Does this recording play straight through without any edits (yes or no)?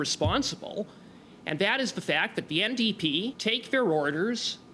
no